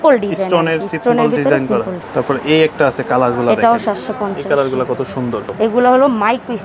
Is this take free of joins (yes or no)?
no